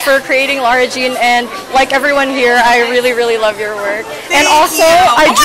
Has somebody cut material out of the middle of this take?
no; 0 cuts

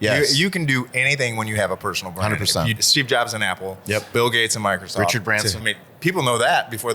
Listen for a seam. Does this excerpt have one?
yes; 3 cuts; at 2.8 s, 4.1 s, 5.6 s

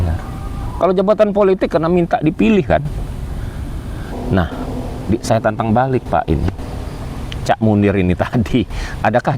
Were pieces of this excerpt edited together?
yes; 1 cut; at 4.1 s

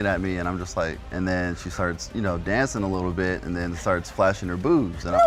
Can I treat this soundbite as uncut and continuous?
yes; 0 cuts

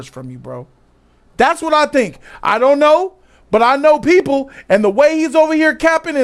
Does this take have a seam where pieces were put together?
no; 0 cuts

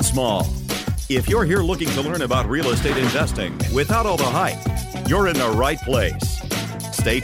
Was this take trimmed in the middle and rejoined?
no; 0 cuts

